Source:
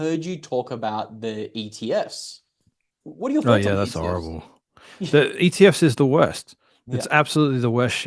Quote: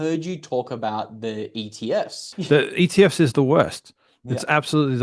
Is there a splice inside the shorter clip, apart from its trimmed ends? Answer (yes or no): yes